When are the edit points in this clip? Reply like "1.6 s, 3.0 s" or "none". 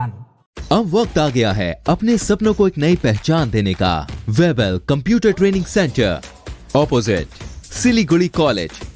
4.1 s